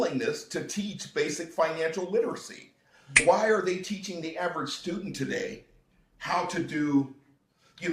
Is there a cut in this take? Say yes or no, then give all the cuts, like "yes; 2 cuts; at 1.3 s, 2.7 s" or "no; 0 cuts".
yes; 1 cut; at 3.2 s